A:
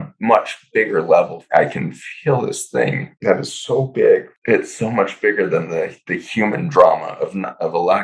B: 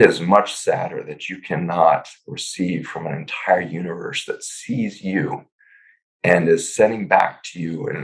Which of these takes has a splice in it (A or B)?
A